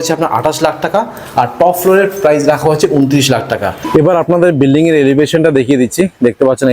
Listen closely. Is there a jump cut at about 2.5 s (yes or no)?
no